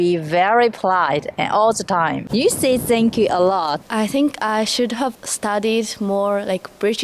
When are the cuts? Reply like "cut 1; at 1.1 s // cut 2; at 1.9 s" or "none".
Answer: cut 1; at 2.2 s // cut 2; at 3.8 s